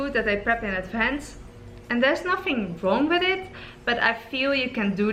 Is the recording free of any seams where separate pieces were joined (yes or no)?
yes